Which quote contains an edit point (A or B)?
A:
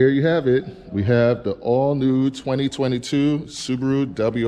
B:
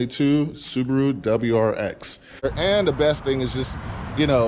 B